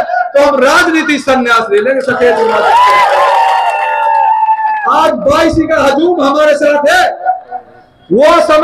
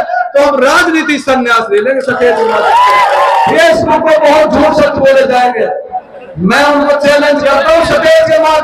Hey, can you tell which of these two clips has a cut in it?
second; 1 cut; at 3.5 s

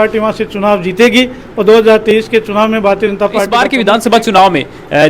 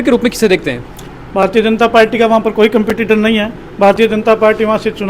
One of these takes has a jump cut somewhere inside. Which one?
first; 1 cut; at 3.5 s

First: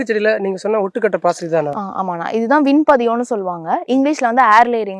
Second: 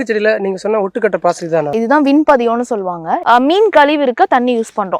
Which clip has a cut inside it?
second; 2 cuts; at 1.7 s, 3.1 s

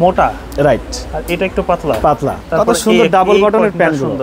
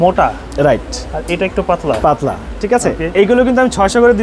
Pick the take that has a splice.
first; 1 cut; at 2.4 s

